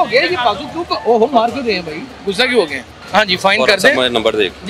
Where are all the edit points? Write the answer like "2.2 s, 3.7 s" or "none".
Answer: 2.9 s

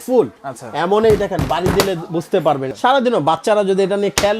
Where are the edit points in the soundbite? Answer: 2.7 s

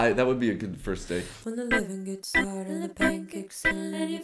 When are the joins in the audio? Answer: 1.3 s

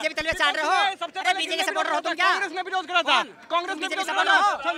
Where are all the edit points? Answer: none

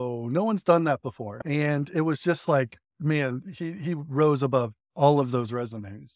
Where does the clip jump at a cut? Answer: 1.4 s

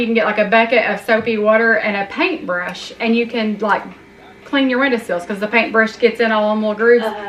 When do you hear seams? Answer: none

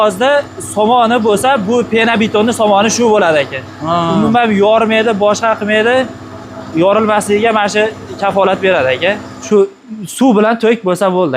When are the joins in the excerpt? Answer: 9.4 s

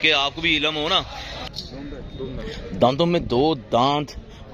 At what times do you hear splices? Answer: 1.4 s

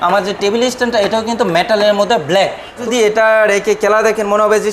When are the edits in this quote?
2.8 s

